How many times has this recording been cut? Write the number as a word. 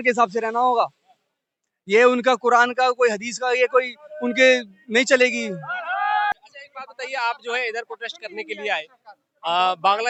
zero